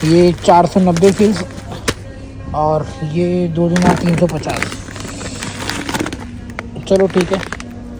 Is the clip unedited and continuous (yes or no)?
yes